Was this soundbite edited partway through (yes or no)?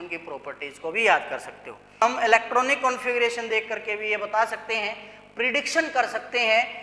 yes